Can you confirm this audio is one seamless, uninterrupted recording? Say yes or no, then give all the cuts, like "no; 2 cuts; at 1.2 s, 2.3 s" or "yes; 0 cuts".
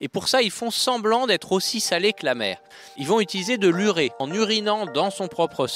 no; 2 cuts; at 2.8 s, 4.2 s